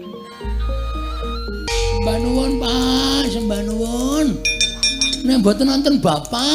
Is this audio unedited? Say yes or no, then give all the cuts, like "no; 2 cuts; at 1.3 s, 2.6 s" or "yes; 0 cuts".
no; 1 cut; at 1.7 s